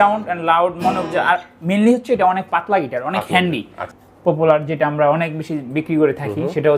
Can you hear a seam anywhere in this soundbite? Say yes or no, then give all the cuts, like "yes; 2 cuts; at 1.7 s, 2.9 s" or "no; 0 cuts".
yes; 1 cut; at 3.8 s